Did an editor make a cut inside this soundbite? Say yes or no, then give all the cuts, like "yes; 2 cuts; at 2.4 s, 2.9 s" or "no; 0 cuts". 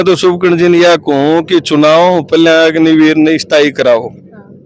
no; 0 cuts